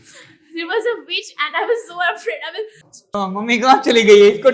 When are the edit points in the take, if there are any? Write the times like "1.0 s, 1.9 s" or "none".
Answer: 3.2 s